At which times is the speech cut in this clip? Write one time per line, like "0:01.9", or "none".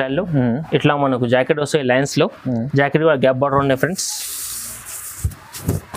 none